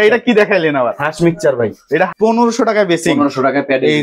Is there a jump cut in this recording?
yes; 1 cut; at 2.1 s

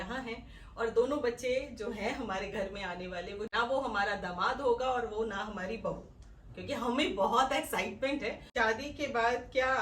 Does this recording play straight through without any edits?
no; 2 cuts; at 3.5 s, 8.4 s

